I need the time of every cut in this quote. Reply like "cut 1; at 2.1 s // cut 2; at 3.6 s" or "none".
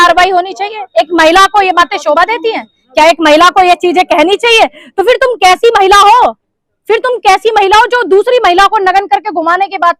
none